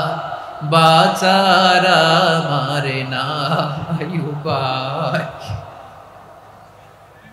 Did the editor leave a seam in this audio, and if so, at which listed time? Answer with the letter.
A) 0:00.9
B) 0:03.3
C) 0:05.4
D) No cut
D